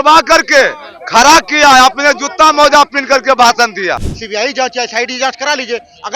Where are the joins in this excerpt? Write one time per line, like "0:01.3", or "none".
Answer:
0:04.1